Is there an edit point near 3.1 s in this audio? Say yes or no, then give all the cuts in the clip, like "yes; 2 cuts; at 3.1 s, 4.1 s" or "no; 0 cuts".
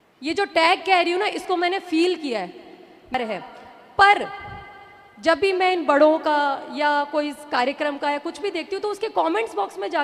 yes; 1 cut; at 3.1 s